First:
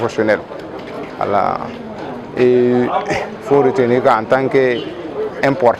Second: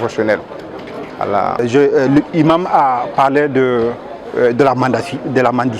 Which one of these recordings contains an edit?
second; 1 cut; at 1.6 s

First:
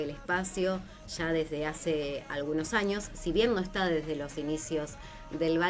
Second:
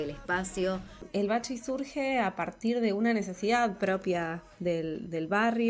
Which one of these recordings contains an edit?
second; 1 cut; at 1.0 s

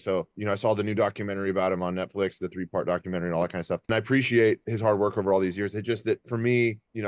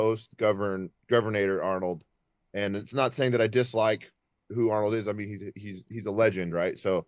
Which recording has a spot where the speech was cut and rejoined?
first; 2 cuts; at 3.9 s, 4.7 s

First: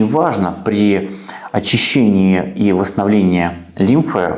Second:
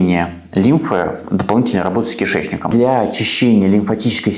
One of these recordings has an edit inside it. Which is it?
second; 1 cut; at 2.7 s

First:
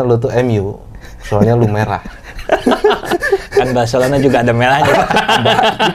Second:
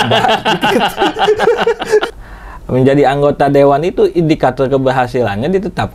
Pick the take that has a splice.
second; 1 cut; at 2.1 s

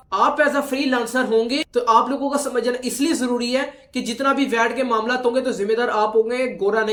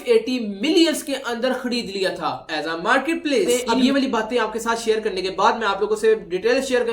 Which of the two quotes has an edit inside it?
second; 1 cut; at 3.5 s

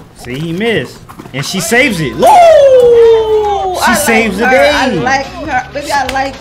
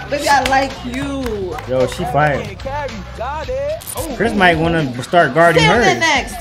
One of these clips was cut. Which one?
second; 1 cut; at 3.9 s

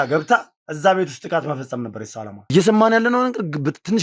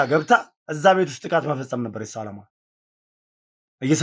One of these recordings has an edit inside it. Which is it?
first; 1 cut; at 2.5 s

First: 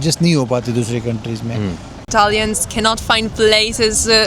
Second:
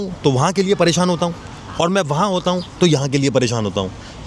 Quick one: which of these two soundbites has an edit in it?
first; 1 cut; at 2.0 s

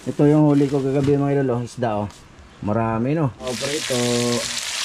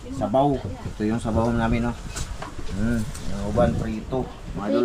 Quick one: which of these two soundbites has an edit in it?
first; 1 cut; at 3.5 s

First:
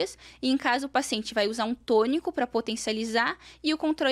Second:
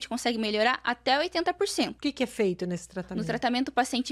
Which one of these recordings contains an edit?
second; 1 cut; at 1.9 s

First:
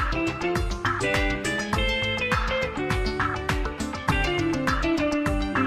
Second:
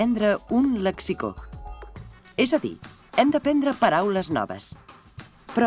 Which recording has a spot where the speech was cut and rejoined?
second; 1 cut; at 4.3 s

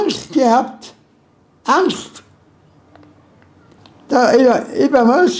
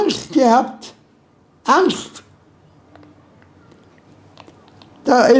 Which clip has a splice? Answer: first; 1 cut; at 3.8 s

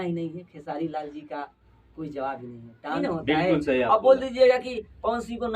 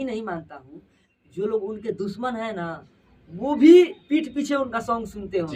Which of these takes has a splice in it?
first; 1 cut; at 3.0 s

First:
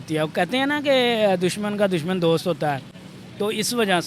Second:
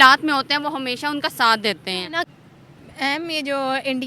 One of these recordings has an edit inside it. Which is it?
second; 1 cut; at 2.3 s

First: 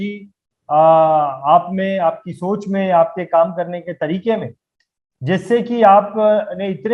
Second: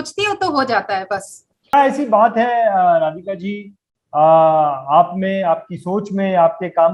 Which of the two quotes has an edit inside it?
second; 1 cut; at 1.7 s

